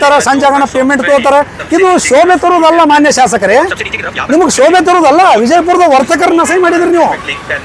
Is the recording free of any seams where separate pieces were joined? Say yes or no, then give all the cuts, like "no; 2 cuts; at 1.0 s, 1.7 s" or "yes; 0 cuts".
yes; 0 cuts